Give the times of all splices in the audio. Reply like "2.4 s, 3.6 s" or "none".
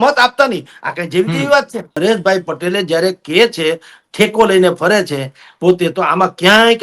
1.9 s